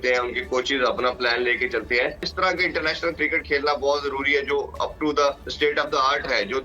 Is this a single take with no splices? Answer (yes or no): no